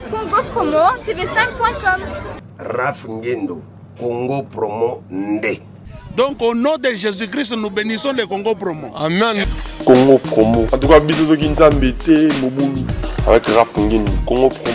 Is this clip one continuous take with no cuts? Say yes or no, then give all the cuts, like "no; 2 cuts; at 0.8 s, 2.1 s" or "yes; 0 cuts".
yes; 0 cuts